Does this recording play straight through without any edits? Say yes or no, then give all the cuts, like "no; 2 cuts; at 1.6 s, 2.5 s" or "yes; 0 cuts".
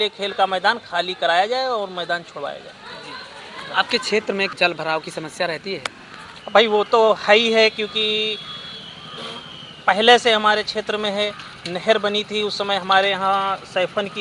yes; 0 cuts